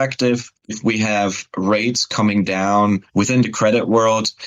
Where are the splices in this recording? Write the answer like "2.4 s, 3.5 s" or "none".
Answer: 3.1 s